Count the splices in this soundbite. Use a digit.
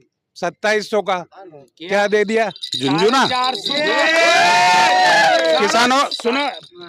0